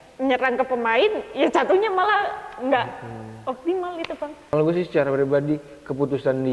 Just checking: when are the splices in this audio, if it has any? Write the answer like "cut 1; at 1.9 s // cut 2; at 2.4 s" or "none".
cut 1; at 4.5 s